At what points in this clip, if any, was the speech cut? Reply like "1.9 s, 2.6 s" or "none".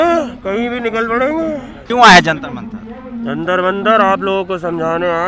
1.8 s